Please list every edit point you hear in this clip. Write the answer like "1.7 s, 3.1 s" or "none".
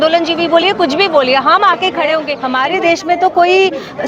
2.4 s